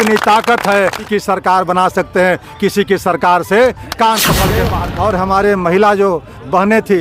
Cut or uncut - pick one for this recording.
cut